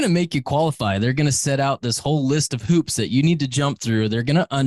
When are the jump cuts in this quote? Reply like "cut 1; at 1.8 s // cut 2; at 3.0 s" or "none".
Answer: none